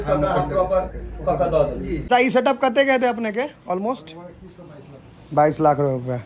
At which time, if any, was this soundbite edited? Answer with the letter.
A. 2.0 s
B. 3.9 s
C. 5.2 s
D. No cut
A